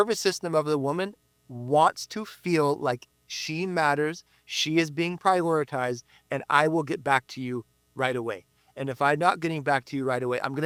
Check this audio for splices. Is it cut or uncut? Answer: uncut